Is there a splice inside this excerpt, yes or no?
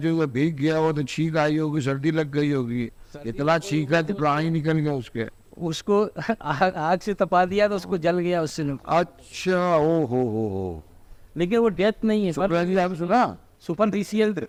no